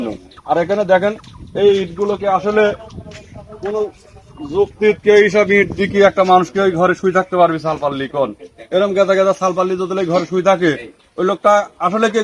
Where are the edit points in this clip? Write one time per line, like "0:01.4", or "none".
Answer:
none